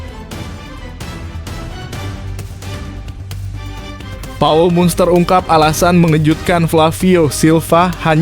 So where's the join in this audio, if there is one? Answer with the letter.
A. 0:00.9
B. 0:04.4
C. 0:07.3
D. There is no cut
B